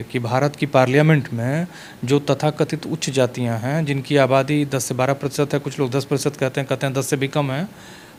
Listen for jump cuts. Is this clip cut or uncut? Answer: uncut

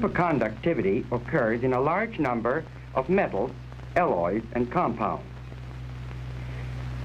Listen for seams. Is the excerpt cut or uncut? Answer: uncut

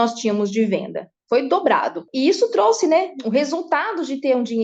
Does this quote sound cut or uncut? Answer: cut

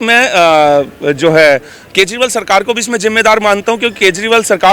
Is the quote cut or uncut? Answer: uncut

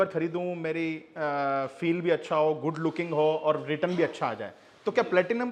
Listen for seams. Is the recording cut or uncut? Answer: uncut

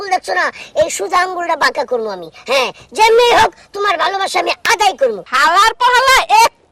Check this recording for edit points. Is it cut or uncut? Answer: uncut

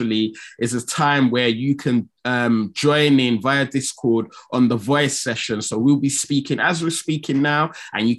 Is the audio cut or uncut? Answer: uncut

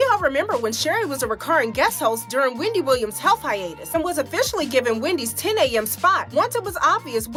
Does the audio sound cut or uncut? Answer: uncut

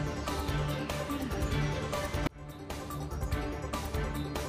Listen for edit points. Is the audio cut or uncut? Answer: uncut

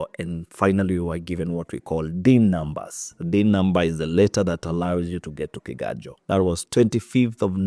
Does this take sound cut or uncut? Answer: cut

